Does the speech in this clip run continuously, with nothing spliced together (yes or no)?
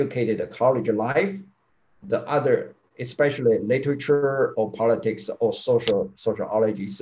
yes